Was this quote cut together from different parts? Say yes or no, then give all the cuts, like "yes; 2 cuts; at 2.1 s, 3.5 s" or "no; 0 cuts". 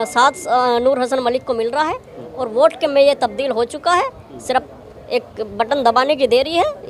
no; 0 cuts